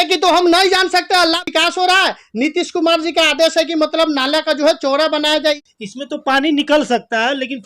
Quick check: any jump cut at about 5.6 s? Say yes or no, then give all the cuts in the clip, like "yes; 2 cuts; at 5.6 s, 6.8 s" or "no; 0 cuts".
yes; 2 cuts; at 1.4 s, 5.6 s